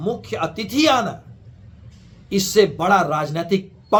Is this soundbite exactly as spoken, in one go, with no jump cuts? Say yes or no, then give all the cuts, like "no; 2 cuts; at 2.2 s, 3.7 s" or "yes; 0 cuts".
yes; 0 cuts